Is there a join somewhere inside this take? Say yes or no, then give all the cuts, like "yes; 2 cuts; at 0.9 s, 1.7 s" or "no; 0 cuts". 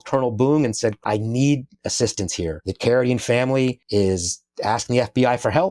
yes; 2 cuts; at 1.0 s, 3.8 s